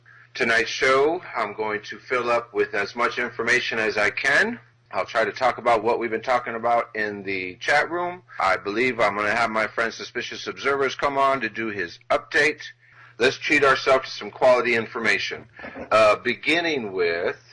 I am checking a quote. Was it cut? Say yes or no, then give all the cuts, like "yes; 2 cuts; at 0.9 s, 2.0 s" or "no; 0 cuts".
no; 0 cuts